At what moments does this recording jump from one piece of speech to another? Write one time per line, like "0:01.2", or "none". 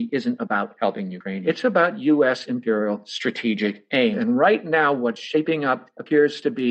0:01.4
0:04.2